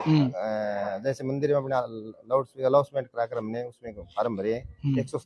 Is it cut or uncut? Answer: uncut